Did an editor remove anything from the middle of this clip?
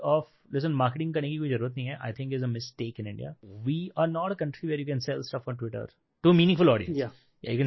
yes; 1 cut; at 3.5 s

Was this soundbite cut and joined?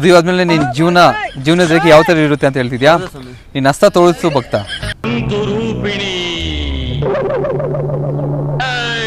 no; 0 cuts

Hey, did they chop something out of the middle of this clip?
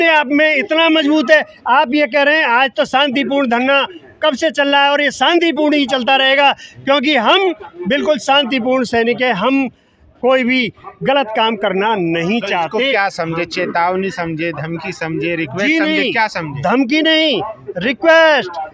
no; 0 cuts

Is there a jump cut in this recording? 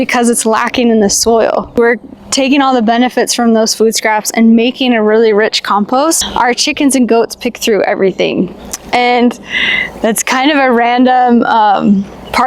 yes; 2 cuts; at 1.8 s, 6.2 s

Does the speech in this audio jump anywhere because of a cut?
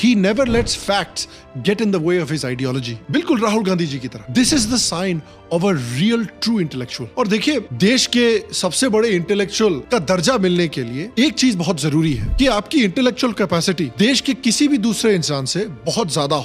no; 0 cuts

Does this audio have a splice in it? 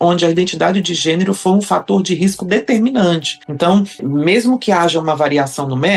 no; 0 cuts

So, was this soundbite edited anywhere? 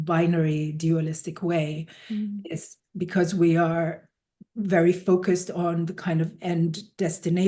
no; 0 cuts

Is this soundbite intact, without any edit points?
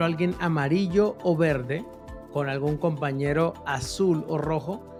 yes; 0 cuts

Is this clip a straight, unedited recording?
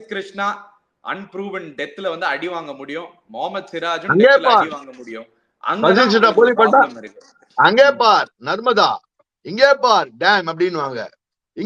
yes; 0 cuts

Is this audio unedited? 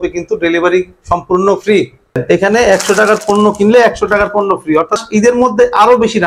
no; 2 cuts; at 2.2 s, 5.0 s

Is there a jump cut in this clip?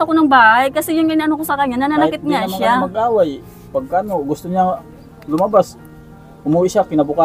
no; 0 cuts

